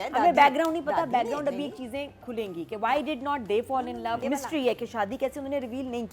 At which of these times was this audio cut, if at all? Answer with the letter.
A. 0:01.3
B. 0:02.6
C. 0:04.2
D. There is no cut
C